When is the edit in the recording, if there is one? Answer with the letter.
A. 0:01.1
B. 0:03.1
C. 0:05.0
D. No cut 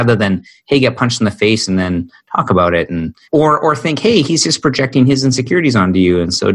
B